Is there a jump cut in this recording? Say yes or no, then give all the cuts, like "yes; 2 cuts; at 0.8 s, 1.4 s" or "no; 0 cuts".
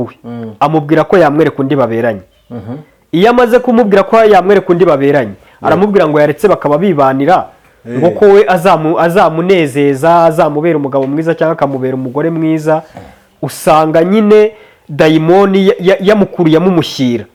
no; 0 cuts